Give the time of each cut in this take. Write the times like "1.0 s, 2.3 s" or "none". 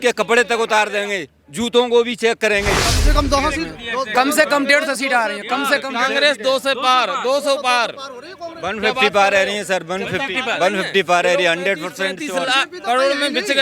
3.0 s